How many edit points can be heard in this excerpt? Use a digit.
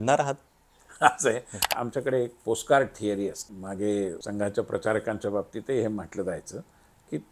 3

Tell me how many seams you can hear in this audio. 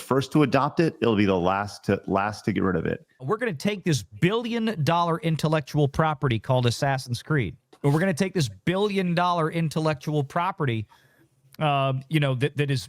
2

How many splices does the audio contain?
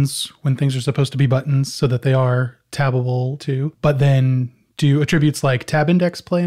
1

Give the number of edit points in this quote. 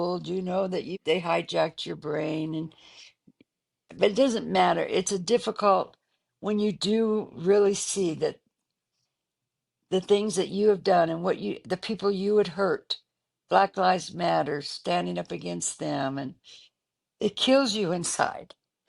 1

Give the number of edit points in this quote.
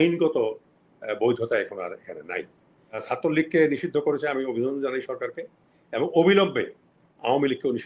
1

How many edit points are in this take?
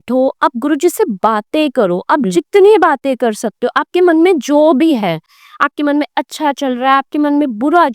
0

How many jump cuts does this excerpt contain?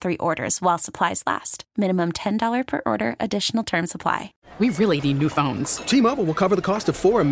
1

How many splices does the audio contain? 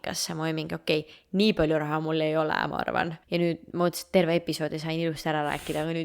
1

